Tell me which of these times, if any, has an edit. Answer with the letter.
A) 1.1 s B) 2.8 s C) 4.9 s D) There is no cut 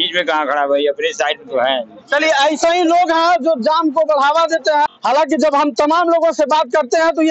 C